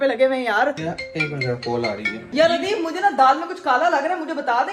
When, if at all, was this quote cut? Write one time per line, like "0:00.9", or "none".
0:00.9
0:02.3